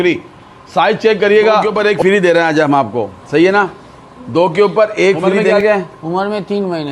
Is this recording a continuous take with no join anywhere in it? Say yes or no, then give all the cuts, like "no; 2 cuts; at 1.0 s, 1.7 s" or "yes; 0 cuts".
no; 2 cuts; at 1.7 s, 5.4 s